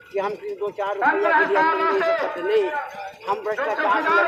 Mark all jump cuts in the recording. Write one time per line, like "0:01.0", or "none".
none